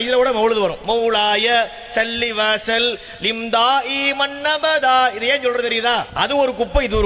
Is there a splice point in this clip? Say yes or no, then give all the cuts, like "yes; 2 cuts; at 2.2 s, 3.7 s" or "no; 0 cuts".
yes; 1 cut; at 6.1 s